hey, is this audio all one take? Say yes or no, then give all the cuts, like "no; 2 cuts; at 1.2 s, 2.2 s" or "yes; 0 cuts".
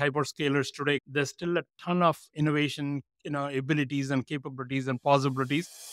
yes; 0 cuts